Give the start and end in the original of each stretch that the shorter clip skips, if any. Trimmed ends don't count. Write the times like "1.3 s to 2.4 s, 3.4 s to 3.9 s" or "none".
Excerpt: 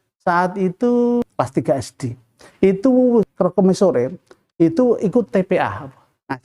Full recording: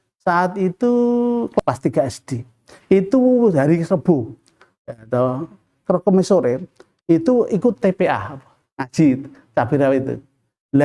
1.3 s to 1.6 s, 3.5 s to 5.7 s